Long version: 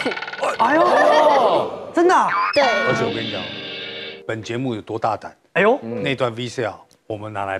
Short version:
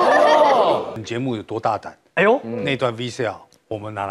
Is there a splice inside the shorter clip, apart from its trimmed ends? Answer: yes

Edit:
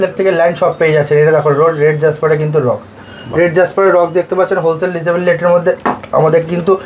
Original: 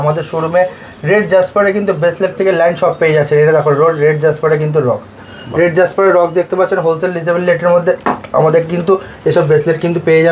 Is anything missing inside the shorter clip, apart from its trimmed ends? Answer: no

